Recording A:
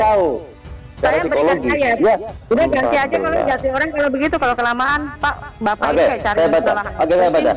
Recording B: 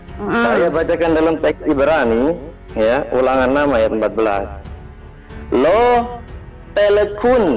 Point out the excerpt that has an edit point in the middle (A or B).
A